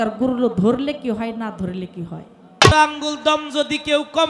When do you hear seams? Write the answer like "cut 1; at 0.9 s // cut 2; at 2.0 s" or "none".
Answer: cut 1; at 2.7 s